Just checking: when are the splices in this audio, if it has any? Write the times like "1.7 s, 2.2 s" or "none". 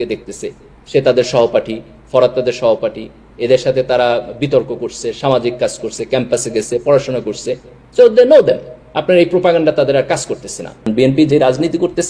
10.9 s

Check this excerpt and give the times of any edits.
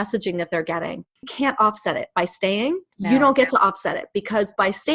1.3 s, 2.9 s

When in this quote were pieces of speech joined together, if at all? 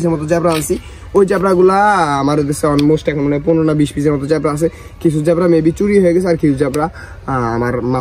none

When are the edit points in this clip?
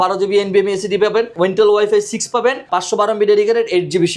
1.3 s, 2.6 s

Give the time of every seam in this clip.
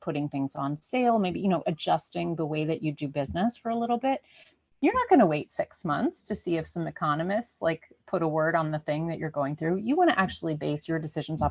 none

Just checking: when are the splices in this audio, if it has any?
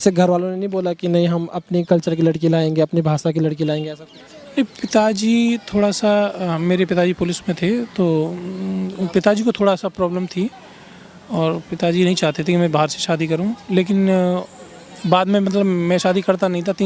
none

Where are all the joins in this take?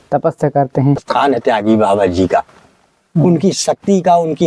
1.1 s

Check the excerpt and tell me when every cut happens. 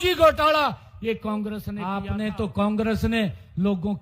1.7 s

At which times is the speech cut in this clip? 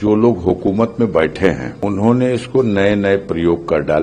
1.7 s

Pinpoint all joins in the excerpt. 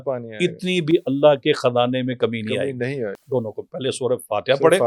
3.1 s

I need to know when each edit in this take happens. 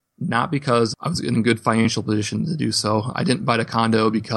none

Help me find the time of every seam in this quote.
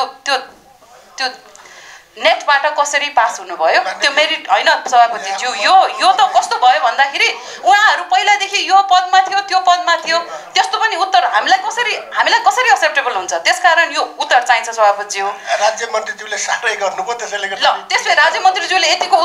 none

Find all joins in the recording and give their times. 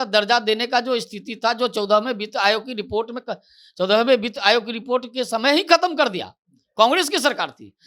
none

